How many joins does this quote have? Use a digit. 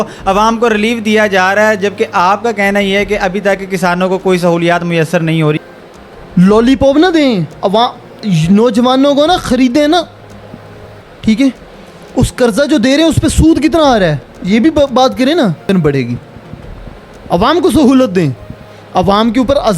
2